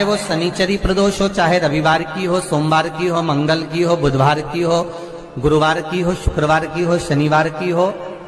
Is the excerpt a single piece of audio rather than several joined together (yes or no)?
yes